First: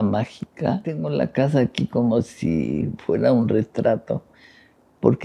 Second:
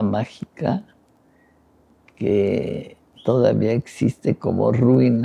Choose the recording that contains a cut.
first; 1 cut; at 1.0 s

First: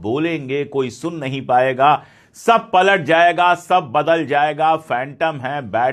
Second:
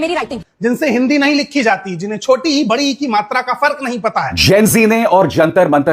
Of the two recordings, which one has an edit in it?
second; 1 cut; at 4.3 s

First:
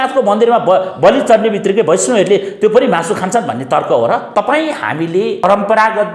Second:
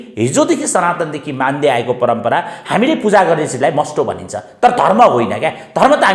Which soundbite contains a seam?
first; 2 cuts; at 4.3 s, 5.4 s

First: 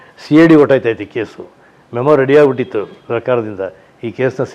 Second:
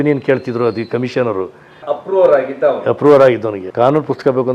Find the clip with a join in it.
second; 2 cuts; at 1.8 s, 3.6 s

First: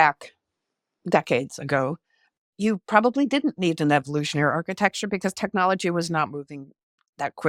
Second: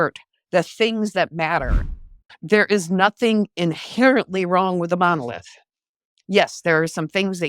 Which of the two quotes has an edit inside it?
second; 1 cut; at 1.8 s

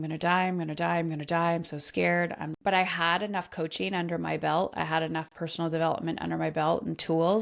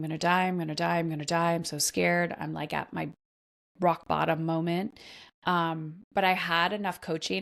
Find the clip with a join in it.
first; 1 cut; at 2.5 s

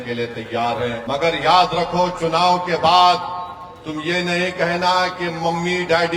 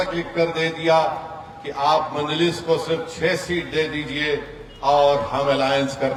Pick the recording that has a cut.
first; 1 cut; at 1.0 s

